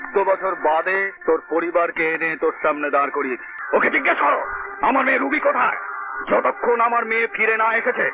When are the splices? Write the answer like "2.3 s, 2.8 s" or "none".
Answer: 3.5 s